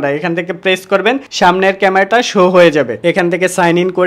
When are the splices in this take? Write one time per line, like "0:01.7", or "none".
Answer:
0:03.0